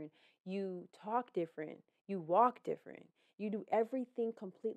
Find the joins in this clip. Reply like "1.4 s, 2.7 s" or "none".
none